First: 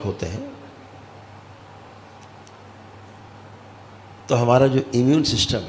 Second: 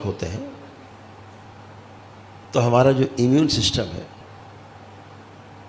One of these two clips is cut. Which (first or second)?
second